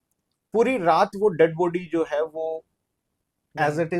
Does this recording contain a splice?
no; 0 cuts

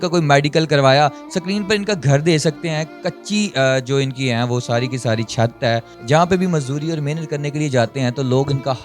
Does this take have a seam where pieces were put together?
yes; 1 cut; at 5.9 s

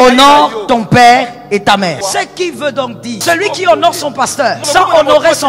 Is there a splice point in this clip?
yes; 3 cuts; at 2.0 s, 3.2 s, 4.6 s

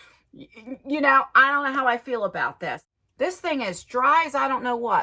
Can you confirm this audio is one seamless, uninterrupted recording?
no; 1 cut; at 2.8 s

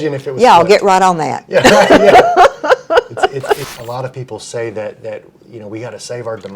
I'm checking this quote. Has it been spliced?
yes; 1 cut; at 3.7 s

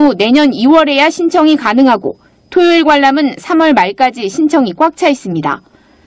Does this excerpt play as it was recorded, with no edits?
no; 1 cut; at 0.9 s

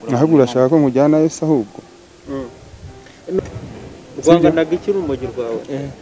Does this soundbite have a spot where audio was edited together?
yes; 1 cut; at 3.4 s

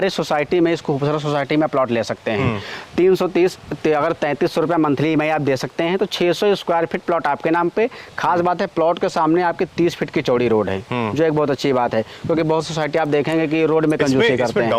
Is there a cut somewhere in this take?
no; 0 cuts

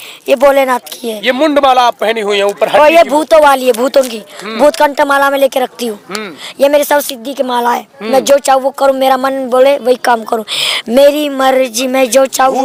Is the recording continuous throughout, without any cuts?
yes; 0 cuts

